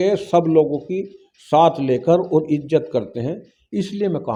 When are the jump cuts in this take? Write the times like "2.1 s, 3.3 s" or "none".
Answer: none